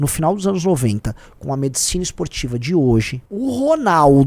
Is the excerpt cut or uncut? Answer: uncut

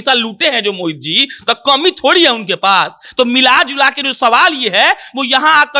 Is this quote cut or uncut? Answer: uncut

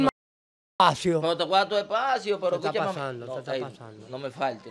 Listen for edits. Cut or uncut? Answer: uncut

